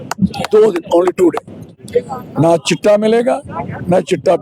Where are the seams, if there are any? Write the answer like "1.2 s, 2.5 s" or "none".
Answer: 1.7 s